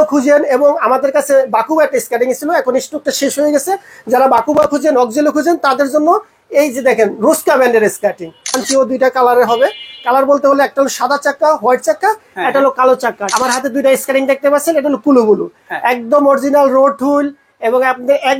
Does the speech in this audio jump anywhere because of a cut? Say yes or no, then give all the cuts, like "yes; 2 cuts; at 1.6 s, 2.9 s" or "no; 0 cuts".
yes; 2 cuts; at 8.6 s, 13.2 s